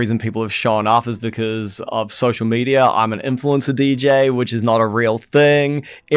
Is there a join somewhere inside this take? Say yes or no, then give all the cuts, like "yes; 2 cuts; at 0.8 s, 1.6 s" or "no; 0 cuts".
no; 0 cuts